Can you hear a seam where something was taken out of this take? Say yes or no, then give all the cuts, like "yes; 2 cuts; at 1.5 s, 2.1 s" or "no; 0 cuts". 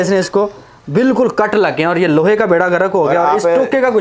no; 0 cuts